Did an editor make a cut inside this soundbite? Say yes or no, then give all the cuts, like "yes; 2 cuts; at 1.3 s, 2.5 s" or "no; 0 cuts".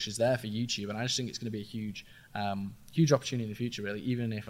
no; 0 cuts